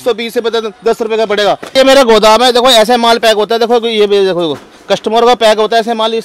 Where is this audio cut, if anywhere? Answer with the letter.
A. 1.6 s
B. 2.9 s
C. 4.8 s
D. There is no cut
A